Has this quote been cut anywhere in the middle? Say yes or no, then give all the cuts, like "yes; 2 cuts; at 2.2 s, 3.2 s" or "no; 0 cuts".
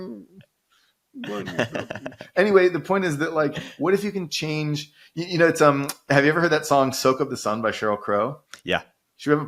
no; 0 cuts